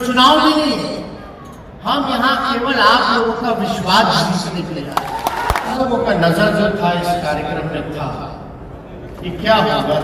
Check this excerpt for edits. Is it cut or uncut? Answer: cut